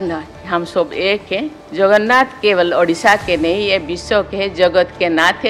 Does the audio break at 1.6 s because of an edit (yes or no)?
yes